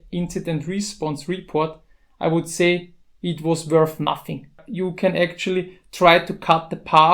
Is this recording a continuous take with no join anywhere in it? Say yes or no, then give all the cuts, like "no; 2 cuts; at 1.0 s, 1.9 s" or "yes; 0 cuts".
no; 1 cut; at 4.6 s